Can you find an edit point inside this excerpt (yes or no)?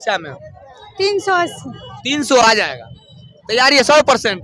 no